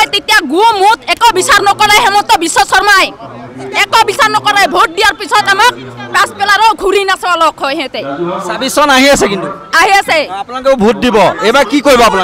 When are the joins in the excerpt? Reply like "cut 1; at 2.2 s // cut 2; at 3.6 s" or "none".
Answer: none